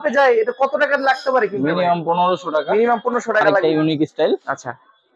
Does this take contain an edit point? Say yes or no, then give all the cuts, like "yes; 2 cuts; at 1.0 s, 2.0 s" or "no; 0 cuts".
yes; 1 cut; at 3.6 s